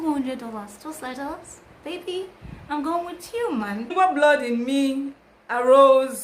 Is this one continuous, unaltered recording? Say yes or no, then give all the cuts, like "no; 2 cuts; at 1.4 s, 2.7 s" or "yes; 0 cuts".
no; 1 cut; at 3.9 s